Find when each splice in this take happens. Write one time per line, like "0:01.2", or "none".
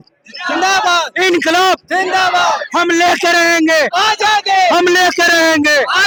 none